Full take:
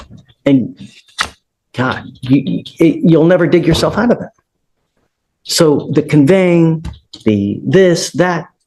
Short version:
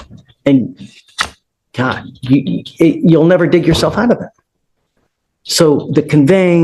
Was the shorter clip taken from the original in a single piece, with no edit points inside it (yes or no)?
yes